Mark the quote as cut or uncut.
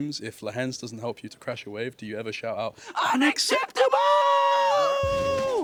uncut